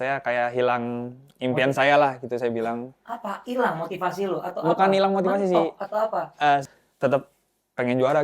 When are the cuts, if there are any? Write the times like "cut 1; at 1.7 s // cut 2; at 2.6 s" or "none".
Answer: cut 1; at 6.7 s